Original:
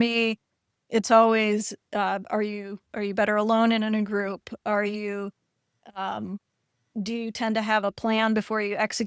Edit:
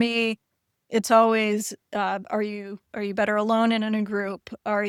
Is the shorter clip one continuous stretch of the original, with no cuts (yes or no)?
yes